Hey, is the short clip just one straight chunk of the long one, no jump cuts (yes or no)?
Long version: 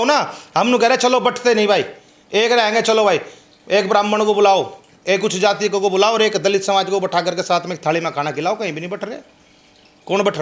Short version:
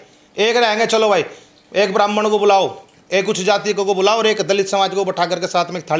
yes